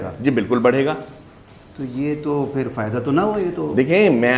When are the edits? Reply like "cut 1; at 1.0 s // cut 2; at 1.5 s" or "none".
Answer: none